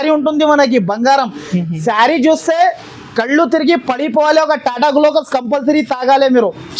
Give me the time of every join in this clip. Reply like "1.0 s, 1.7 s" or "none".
none